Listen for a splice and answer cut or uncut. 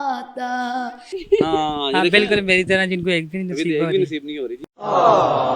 cut